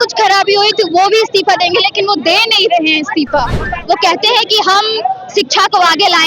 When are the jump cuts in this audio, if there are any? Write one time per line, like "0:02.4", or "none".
0:03.6